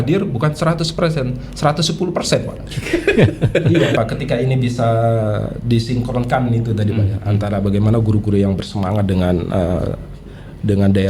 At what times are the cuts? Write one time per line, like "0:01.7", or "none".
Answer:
0:03.9